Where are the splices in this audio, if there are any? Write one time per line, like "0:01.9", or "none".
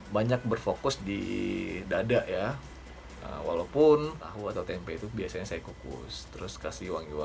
0:04.3